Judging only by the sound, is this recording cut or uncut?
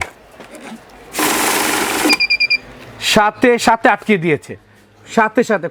uncut